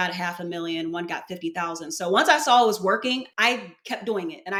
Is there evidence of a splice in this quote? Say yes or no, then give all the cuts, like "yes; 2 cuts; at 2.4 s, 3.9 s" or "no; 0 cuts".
no; 0 cuts